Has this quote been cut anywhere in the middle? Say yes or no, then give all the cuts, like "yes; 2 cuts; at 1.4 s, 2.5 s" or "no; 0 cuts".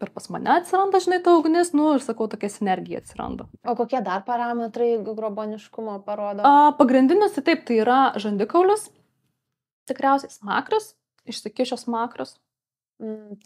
yes; 1 cut; at 3.6 s